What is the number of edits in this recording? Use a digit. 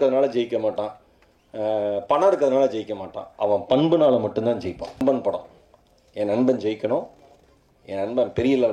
1